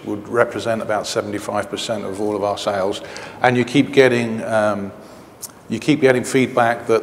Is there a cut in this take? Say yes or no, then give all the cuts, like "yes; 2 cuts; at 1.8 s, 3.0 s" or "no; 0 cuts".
no; 0 cuts